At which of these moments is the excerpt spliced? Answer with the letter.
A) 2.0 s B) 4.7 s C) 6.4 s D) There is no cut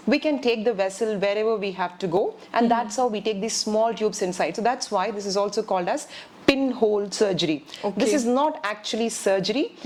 D